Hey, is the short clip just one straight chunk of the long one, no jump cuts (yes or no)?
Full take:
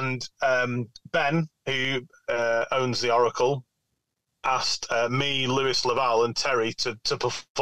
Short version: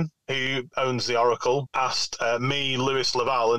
no